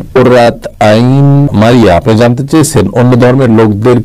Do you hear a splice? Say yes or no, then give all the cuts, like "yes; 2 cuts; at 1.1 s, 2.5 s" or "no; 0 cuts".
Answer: no; 0 cuts